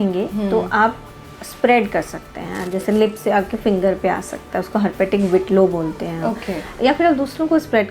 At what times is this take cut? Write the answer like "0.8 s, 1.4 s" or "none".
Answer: 6.7 s